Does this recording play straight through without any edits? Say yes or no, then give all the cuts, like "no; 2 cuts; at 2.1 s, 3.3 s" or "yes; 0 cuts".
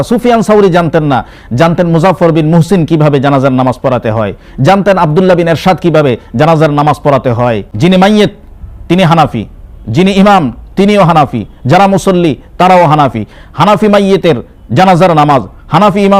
no; 1 cut; at 7.7 s